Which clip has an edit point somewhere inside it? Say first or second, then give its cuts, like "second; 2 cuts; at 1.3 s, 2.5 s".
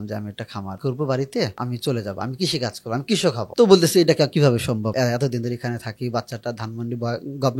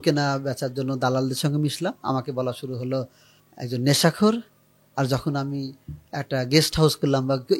first; 4 cuts; at 0.8 s, 1.6 s, 3.4 s, 4.9 s